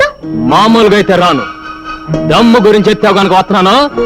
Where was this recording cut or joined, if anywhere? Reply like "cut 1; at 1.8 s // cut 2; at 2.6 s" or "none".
none